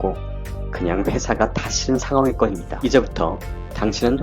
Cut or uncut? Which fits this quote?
cut